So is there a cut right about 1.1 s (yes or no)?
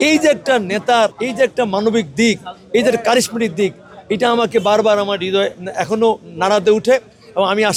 no